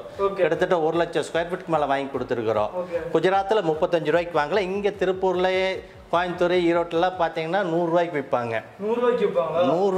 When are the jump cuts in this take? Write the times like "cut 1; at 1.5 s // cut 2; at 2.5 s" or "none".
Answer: none